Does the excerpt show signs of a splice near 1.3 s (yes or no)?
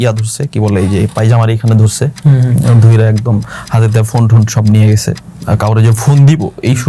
no